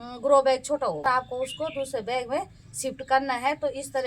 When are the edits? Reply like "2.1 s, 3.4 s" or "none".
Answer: 1.0 s